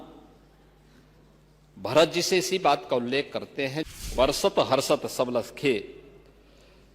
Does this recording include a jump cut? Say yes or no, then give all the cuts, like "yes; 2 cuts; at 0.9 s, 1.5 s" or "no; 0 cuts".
yes; 1 cut; at 4.1 s